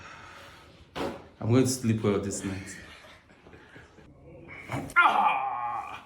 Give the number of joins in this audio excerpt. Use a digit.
1